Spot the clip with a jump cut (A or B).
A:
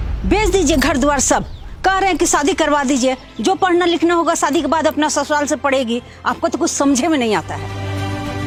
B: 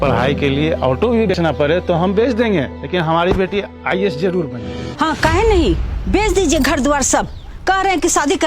B